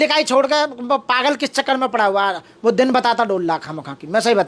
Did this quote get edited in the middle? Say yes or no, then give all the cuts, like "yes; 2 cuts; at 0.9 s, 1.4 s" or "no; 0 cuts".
no; 0 cuts